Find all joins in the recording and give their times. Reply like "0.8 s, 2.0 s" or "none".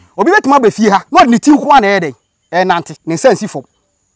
1.1 s, 2.9 s